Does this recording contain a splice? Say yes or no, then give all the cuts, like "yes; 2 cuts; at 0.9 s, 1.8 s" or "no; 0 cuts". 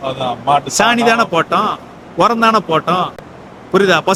no; 0 cuts